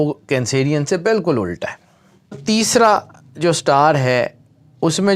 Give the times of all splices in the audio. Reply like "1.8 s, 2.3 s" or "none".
2.4 s

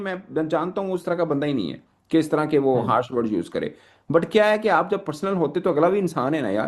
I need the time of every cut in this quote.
none

